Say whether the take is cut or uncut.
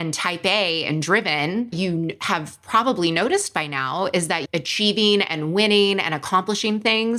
uncut